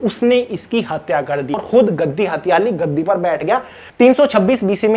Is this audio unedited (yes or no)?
no